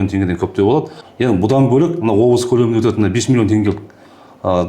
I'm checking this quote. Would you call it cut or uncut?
cut